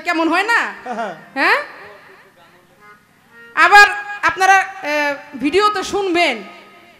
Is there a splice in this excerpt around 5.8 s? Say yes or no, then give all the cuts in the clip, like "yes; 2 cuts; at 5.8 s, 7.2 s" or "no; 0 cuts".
no; 0 cuts